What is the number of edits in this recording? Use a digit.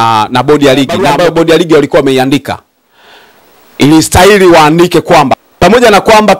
2